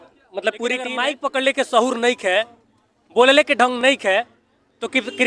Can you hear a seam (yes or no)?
yes